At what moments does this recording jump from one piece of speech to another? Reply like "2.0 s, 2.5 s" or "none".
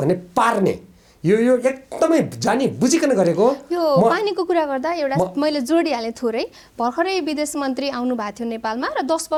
none